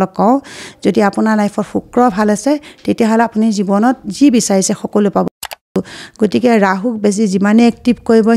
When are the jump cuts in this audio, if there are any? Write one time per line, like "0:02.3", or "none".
0:05.5